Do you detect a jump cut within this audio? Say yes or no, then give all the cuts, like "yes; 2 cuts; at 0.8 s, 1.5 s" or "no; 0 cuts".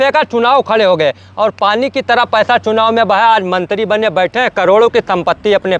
no; 0 cuts